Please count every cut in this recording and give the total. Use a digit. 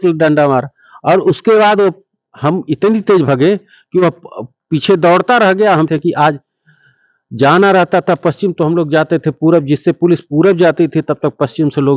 1